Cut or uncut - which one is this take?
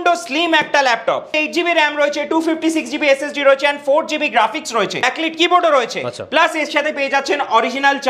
cut